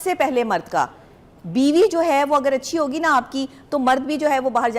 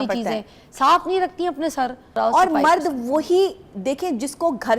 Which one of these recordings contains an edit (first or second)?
second